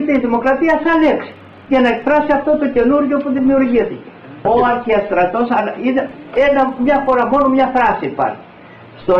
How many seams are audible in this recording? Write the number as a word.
one